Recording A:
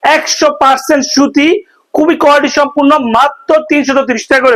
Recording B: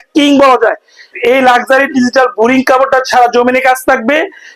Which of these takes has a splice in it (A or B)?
B